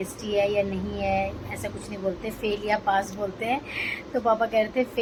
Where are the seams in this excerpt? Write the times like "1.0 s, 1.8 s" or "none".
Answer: none